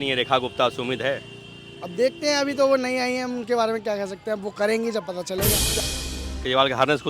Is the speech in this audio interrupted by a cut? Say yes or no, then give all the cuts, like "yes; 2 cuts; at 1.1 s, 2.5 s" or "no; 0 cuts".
yes; 1 cut; at 5.8 s